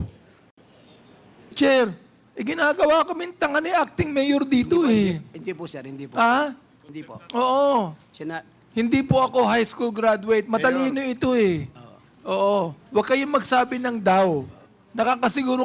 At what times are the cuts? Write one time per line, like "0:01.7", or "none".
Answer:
0:01.5